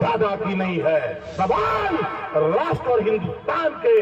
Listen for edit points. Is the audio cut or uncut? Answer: cut